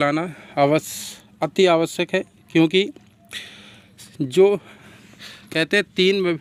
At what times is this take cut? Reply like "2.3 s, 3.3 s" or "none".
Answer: none

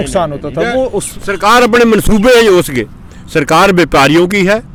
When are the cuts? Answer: none

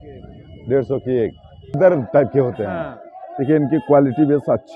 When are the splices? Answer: 1.8 s

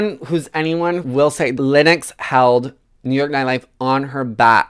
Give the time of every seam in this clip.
1.0 s

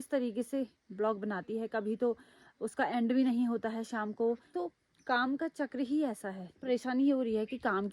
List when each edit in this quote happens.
4.5 s, 6.6 s

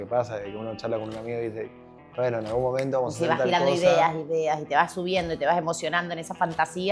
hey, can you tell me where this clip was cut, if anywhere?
none

